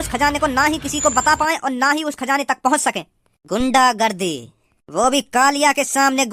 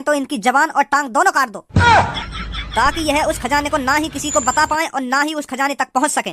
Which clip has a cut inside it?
second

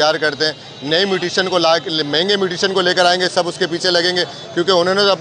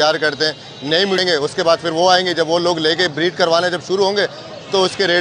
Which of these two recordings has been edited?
second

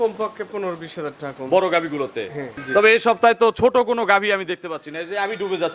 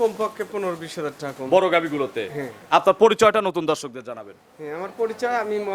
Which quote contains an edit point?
first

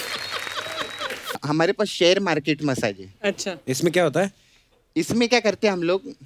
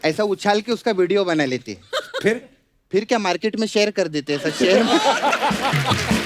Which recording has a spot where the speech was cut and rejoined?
first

